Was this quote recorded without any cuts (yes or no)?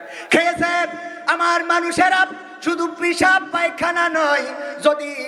yes